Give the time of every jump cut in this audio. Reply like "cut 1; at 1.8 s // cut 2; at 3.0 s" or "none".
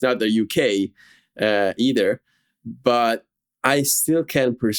none